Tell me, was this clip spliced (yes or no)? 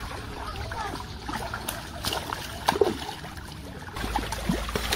no